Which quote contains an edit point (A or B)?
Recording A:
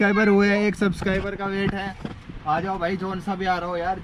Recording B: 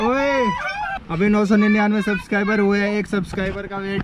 B